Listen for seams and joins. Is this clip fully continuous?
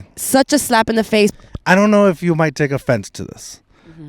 no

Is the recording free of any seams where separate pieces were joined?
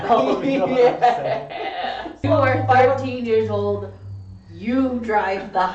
no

